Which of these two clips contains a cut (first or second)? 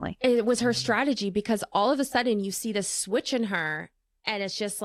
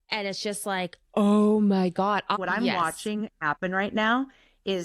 second